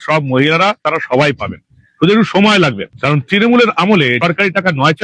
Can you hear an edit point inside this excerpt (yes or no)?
no